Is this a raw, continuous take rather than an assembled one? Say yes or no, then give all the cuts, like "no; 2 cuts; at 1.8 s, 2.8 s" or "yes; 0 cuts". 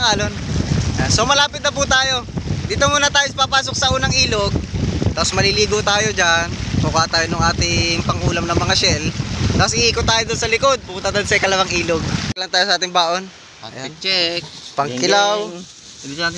no; 1 cut; at 12.3 s